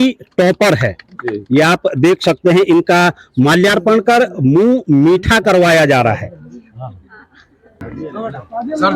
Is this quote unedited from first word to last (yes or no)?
no